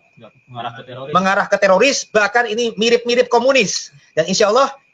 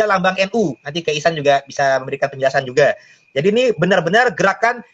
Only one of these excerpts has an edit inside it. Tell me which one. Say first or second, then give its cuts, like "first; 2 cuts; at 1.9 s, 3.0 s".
first; 1 cut; at 4.0 s